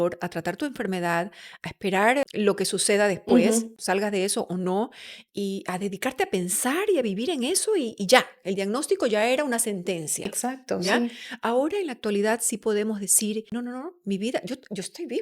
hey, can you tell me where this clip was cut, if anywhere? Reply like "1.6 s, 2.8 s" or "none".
2.2 s, 3.8 s, 13.5 s